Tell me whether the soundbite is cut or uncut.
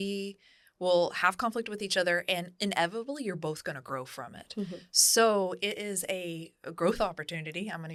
uncut